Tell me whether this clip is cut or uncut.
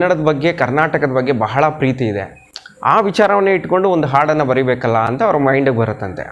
uncut